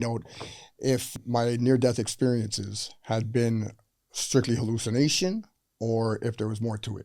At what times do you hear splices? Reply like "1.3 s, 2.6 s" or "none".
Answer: 1.1 s